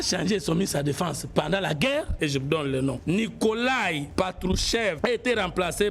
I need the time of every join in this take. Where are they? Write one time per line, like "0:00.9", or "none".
0:02.1
0:03.0
0:04.1
0:05.0